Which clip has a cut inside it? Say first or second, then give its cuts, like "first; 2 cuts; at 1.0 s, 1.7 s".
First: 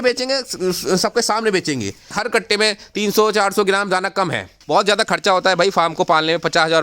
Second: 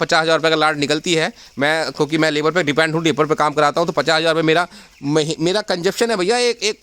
first; 2 cuts; at 2.1 s, 4.5 s